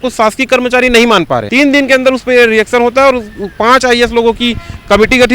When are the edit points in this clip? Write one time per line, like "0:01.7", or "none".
0:01.5